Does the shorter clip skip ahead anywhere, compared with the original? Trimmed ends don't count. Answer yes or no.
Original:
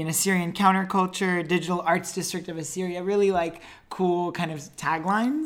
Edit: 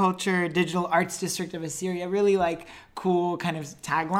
no